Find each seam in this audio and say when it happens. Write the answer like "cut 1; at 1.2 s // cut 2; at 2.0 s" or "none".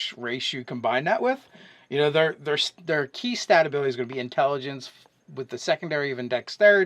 cut 1; at 4.1 s